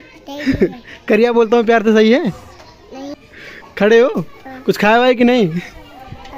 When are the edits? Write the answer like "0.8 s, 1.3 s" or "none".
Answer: 3.1 s